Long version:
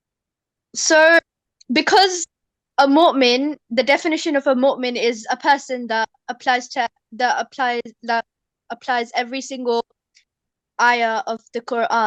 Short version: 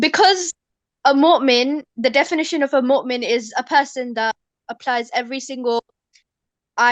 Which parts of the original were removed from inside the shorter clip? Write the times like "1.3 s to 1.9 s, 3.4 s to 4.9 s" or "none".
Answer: 6.2 s to 8.5 s